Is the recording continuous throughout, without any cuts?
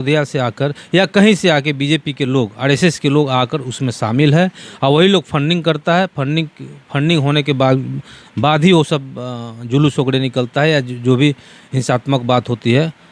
yes; 0 cuts

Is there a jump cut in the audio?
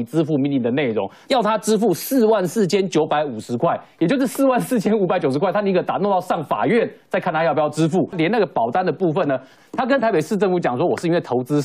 yes; 3 cuts; at 1.2 s, 8.1 s, 9.5 s

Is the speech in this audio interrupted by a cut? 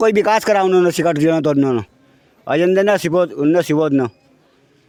no; 0 cuts

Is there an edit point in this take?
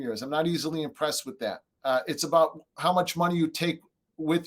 yes; 1 cut; at 1.7 s

